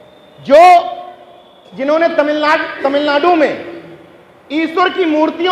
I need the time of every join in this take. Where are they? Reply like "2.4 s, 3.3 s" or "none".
none